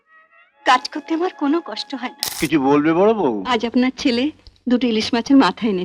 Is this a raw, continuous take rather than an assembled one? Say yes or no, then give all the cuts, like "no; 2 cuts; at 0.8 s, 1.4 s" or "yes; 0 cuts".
no; 1 cut; at 2.2 s